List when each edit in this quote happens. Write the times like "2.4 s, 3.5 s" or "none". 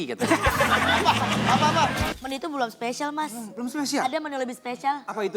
2.1 s